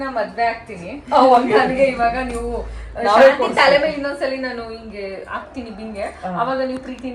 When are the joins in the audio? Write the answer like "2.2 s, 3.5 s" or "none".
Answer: none